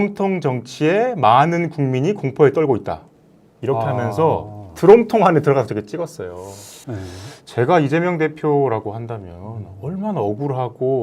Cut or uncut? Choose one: cut